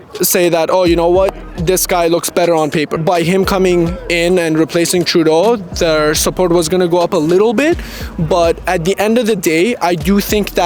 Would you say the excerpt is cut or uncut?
cut